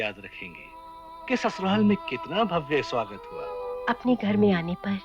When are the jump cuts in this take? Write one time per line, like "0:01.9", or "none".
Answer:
0:03.7

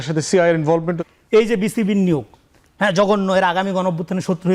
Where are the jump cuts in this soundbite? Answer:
0:01.0

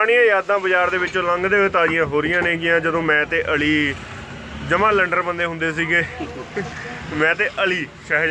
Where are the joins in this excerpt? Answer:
none

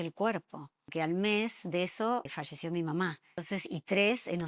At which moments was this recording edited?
0:00.9
0:02.3
0:03.4

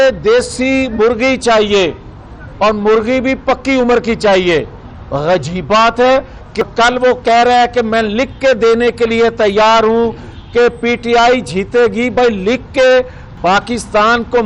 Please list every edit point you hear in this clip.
0:06.6
0:13.2

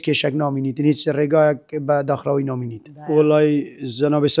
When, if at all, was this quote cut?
0:02.8

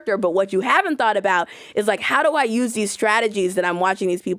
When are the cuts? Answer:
none

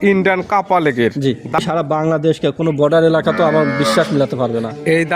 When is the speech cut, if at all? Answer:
0:01.6

